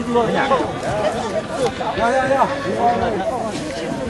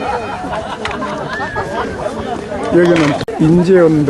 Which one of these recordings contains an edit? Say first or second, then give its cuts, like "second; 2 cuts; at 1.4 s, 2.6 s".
second; 1 cut; at 3.2 s